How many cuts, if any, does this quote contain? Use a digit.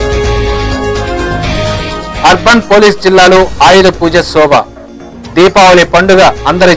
1